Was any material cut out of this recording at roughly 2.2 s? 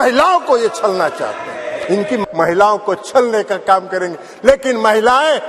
yes; 1 cut; at 2.2 s

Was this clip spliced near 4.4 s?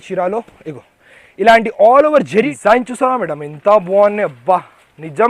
no; 1 cut; at 2.5 s

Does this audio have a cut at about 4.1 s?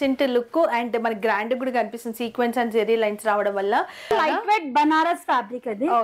yes; 1 cut; at 4.1 s

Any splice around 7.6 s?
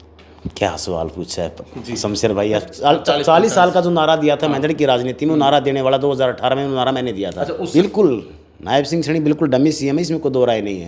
yes; 2 cuts; at 2.7 s, 7.6 s

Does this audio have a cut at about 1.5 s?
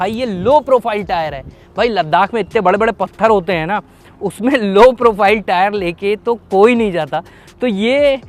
no; 0 cuts

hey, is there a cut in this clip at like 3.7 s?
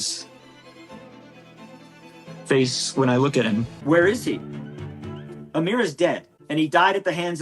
yes; 2 cuts; at 3.7 s, 6.3 s

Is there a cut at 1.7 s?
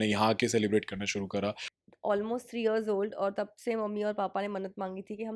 yes; 1 cut; at 1.7 s

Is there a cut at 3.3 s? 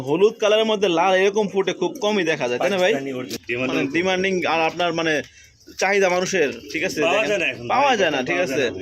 yes; 1 cut; at 3.3 s

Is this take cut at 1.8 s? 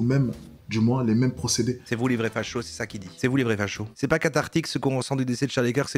no; 1 cut; at 3.8 s

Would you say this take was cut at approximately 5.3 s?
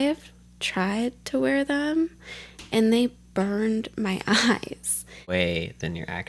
yes; 1 cut; at 5.3 s

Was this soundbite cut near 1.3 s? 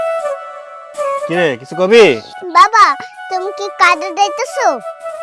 yes; 1 cut; at 1.3 s

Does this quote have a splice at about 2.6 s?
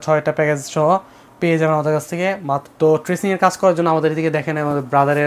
yes; 1 cut; at 2.6 s

